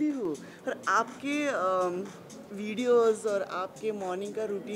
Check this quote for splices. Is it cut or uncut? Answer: uncut